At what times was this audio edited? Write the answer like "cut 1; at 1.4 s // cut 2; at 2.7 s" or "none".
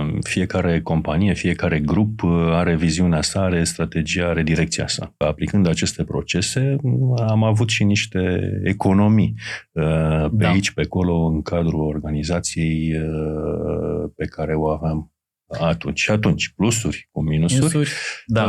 cut 1; at 5.2 s